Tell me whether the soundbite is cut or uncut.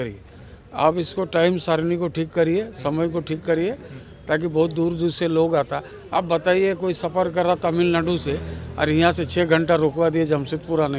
uncut